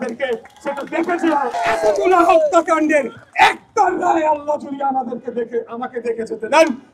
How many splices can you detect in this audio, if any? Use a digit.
1